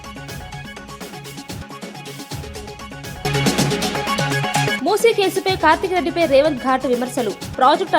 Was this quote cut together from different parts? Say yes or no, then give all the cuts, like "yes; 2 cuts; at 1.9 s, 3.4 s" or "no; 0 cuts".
yes; 1 cut; at 1.1 s